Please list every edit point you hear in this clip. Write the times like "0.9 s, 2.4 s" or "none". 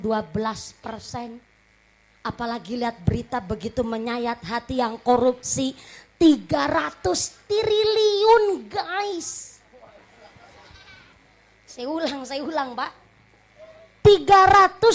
10.6 s